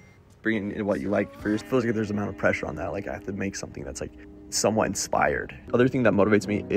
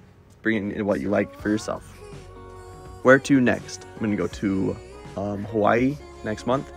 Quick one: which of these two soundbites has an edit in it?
first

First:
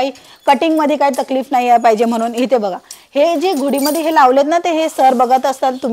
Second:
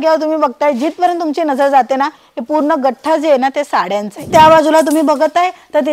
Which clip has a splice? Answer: second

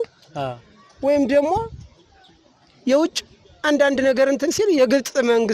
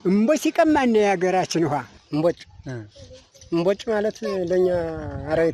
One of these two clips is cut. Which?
second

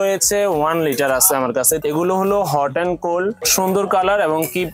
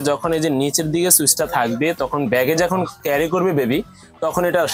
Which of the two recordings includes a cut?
first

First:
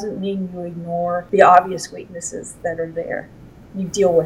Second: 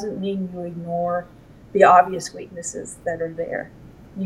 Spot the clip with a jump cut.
first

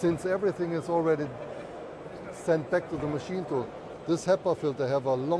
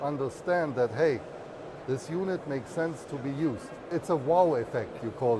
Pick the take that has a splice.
second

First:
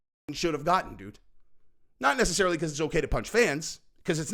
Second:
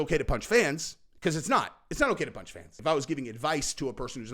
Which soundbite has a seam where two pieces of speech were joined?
second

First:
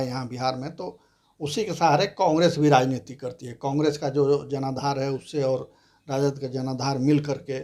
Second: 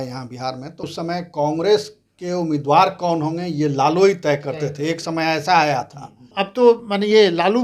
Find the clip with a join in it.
second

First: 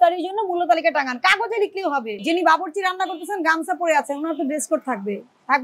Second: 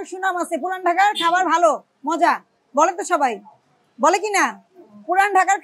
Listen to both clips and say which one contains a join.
first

